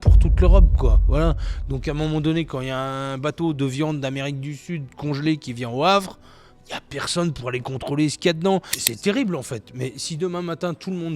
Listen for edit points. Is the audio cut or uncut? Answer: cut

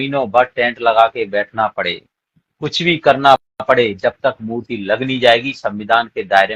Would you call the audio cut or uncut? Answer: uncut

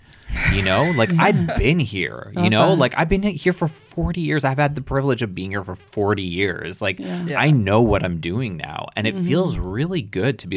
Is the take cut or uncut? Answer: uncut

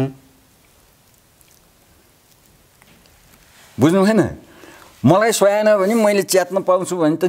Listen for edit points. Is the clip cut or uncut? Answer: uncut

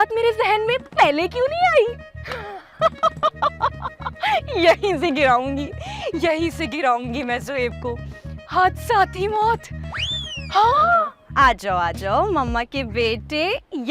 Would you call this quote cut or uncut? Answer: uncut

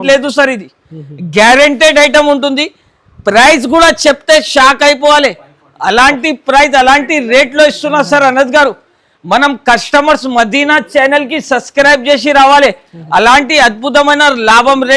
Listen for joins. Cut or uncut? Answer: uncut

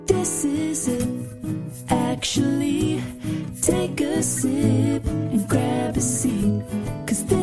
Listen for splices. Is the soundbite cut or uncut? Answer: uncut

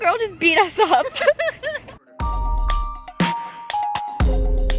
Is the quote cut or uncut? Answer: cut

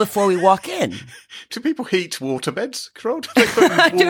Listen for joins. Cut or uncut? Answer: cut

